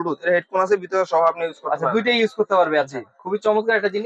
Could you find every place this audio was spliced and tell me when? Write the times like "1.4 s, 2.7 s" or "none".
none